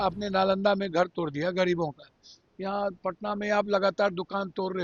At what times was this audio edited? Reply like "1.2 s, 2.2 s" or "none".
none